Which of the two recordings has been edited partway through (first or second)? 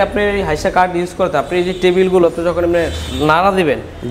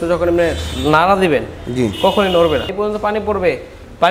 second